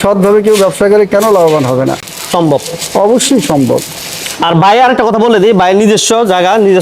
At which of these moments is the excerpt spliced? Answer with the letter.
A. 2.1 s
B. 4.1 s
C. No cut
C